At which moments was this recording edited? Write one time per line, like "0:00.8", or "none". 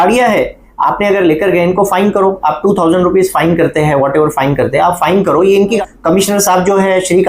0:05.8